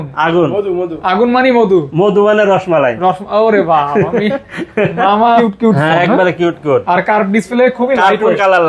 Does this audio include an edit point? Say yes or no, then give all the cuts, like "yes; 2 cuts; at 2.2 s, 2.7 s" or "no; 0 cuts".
yes; 1 cut; at 5.4 s